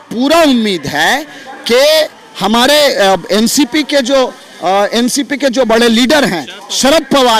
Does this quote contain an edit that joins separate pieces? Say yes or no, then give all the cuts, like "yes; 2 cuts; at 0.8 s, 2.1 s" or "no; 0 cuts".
no; 0 cuts